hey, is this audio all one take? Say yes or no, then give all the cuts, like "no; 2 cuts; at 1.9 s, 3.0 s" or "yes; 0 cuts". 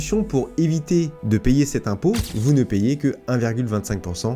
no; 1 cut; at 2.3 s